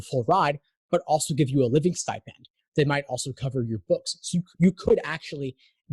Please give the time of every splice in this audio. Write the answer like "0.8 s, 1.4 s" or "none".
none